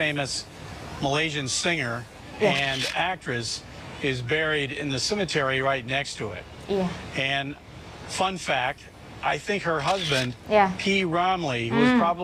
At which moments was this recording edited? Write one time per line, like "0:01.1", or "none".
none